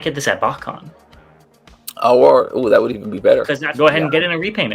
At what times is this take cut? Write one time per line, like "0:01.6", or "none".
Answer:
0:03.6